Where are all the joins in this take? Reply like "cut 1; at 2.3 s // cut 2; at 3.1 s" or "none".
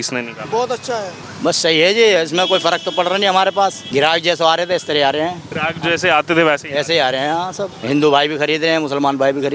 cut 1; at 1.2 s // cut 2; at 3.8 s // cut 3; at 5.5 s // cut 4; at 7.7 s